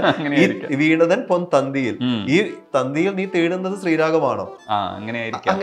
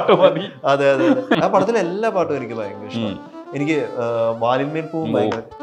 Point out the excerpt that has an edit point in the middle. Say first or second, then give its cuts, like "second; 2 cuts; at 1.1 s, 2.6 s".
second; 1 cut; at 1.3 s